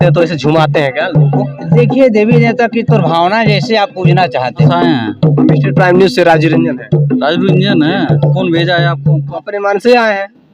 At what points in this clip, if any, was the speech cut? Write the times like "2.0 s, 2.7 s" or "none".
4.7 s, 8.2 s, 9.4 s